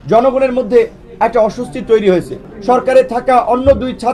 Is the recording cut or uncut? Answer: cut